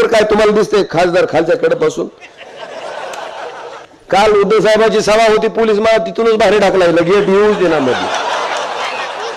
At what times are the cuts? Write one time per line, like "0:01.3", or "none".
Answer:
0:03.9